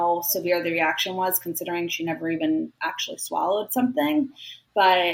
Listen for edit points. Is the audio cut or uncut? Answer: uncut